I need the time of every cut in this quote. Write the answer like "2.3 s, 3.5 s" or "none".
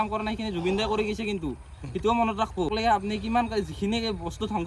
2.7 s

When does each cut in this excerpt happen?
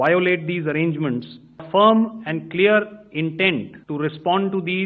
1.6 s, 3.8 s

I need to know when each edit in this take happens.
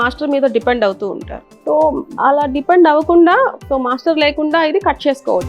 3.6 s

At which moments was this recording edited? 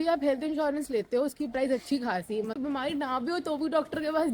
2.5 s

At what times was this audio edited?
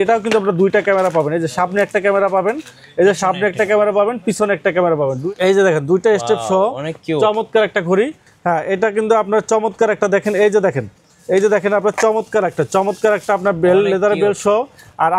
5.2 s

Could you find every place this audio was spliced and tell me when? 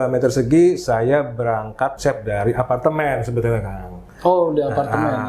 2.0 s

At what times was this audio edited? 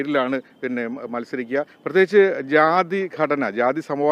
none

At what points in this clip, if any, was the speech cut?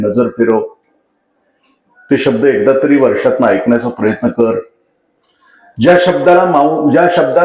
none

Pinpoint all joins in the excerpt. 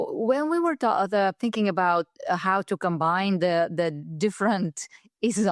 none

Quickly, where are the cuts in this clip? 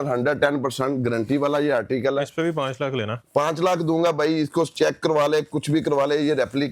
none

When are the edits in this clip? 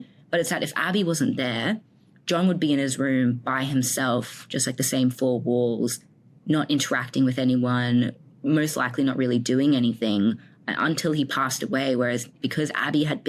12.3 s

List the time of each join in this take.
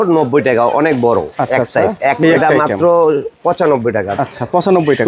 2.2 s

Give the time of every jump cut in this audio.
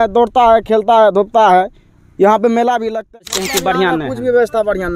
3.2 s

